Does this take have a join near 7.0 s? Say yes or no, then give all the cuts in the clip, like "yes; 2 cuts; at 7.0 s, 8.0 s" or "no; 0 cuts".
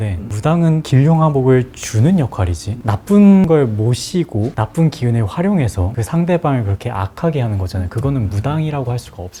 no; 0 cuts